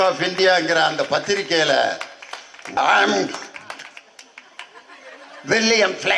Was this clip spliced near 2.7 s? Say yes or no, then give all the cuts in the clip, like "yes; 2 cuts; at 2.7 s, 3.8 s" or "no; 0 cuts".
yes; 1 cut; at 2.7 s